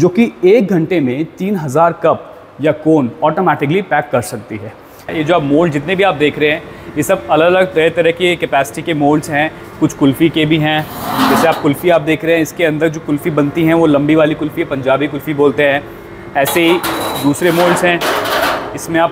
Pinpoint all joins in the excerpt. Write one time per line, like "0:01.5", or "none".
0:05.1